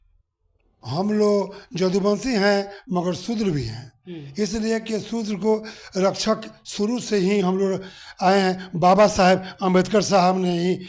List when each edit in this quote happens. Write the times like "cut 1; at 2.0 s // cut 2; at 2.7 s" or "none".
none